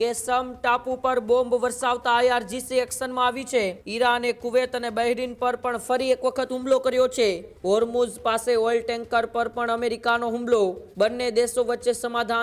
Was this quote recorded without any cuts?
no; 3 cuts; at 3.8 s, 7.5 s, 10.8 s

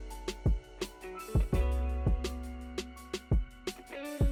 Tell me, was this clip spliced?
no; 0 cuts

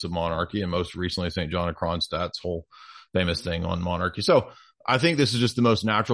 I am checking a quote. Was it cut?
no; 0 cuts

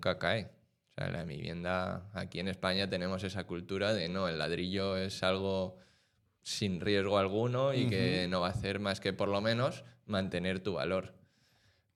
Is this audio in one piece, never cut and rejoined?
yes; 0 cuts

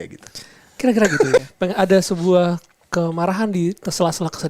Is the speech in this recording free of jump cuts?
no; 1 cut; at 1.4 s

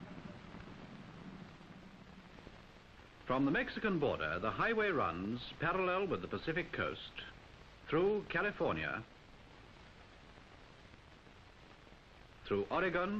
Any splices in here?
no; 0 cuts

